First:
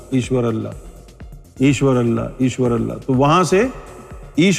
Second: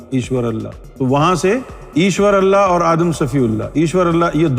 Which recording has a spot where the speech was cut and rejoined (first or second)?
second